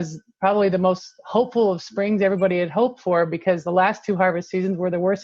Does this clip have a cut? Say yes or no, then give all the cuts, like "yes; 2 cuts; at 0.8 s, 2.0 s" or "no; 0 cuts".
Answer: no; 0 cuts